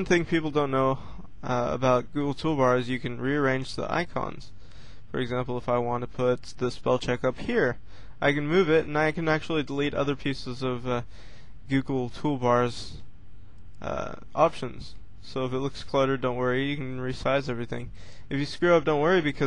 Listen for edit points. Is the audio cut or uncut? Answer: uncut